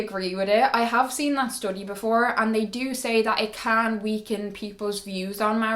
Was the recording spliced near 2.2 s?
no; 0 cuts

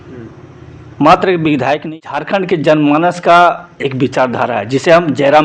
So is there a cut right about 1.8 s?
yes; 1 cut; at 1.8 s

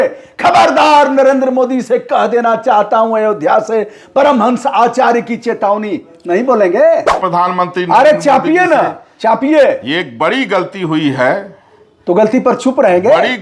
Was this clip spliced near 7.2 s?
yes; 1 cut; at 7.2 s

